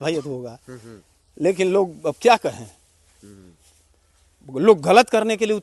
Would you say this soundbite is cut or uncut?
uncut